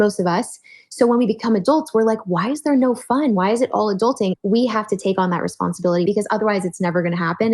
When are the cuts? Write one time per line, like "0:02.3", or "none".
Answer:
0:04.3
0:06.0